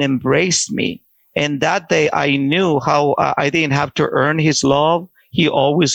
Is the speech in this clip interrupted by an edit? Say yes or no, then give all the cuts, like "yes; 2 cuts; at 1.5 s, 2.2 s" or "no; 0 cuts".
no; 0 cuts